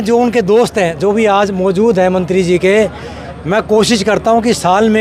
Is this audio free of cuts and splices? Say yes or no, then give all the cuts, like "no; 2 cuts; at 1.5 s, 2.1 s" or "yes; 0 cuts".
yes; 0 cuts